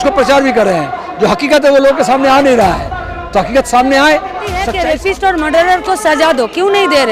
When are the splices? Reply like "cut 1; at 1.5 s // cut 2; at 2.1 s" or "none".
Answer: cut 1; at 4.7 s